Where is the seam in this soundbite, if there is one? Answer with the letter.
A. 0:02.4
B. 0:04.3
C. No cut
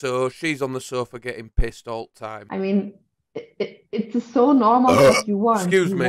A